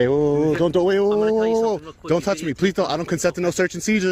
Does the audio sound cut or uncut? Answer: uncut